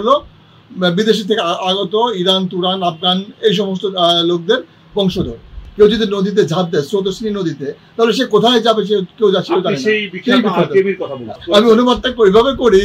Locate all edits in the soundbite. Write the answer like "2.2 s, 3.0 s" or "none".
5.6 s, 11.3 s

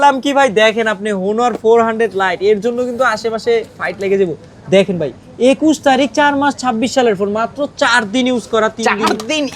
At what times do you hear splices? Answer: none

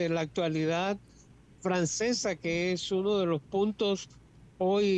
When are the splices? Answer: none

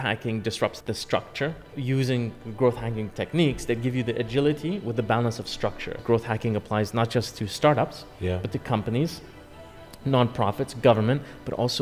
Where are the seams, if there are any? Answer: 0.8 s, 1.7 s, 6.0 s

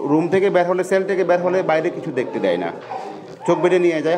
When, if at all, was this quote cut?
none

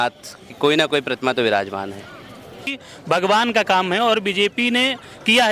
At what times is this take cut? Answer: 2.7 s

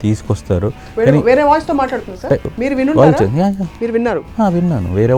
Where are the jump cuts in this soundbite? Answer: 2.5 s, 3.7 s

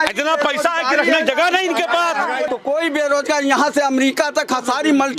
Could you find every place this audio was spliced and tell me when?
2.5 s

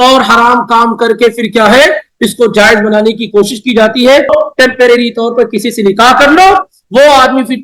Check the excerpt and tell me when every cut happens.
4.3 s

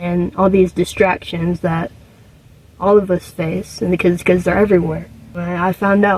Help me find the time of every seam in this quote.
none

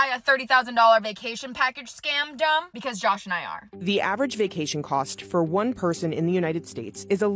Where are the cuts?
2.7 s, 3.7 s

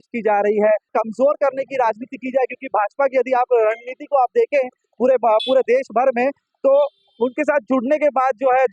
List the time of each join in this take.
0.9 s

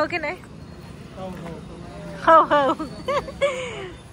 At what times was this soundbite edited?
none

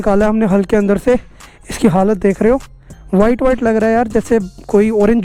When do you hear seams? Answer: none

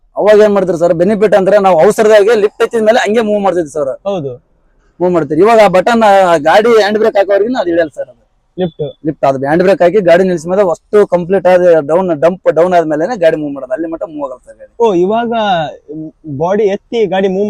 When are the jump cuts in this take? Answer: none

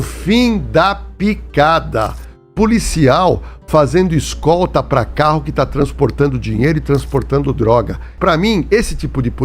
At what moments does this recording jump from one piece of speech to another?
8.1 s

